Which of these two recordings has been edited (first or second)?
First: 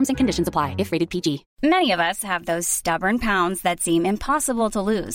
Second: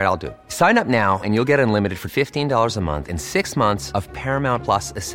first